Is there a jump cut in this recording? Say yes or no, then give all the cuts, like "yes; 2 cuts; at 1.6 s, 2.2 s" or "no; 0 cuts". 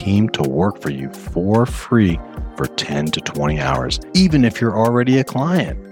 yes; 1 cut; at 4.0 s